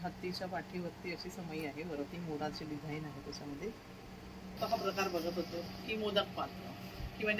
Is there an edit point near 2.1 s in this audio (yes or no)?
no